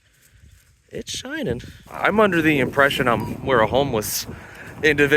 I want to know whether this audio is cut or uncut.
cut